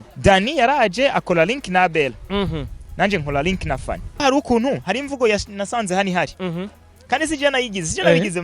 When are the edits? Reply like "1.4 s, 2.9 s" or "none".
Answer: 4.1 s